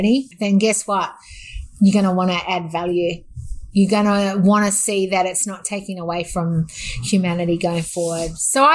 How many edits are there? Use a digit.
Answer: 0